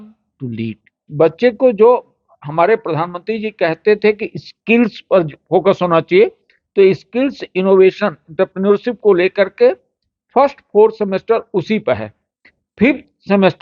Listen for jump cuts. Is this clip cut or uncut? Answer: cut